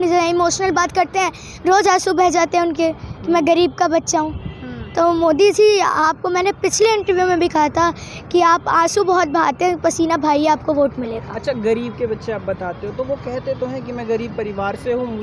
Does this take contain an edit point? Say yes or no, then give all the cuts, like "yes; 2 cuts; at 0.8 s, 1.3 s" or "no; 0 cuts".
no; 0 cuts